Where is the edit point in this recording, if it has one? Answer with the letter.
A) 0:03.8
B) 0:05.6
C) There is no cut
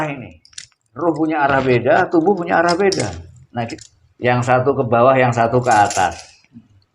A